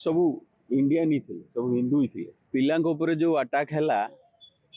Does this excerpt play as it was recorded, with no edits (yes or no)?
no